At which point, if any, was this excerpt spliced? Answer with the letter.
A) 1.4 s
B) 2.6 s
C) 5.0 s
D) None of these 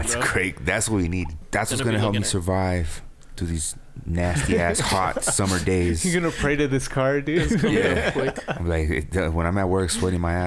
A